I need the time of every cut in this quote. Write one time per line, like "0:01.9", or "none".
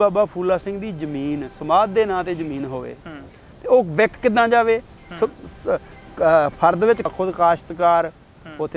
0:07.1